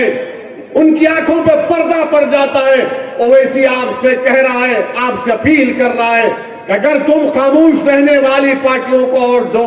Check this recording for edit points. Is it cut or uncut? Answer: uncut